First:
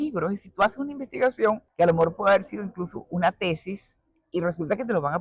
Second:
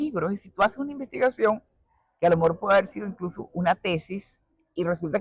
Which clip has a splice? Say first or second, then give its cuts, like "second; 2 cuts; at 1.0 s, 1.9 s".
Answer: first; 1 cut; at 1.7 s